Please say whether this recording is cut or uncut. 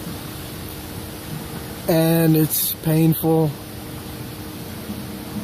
cut